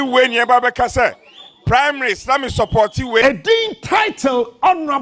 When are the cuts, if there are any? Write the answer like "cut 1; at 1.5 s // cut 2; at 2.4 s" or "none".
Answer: cut 1; at 3.2 s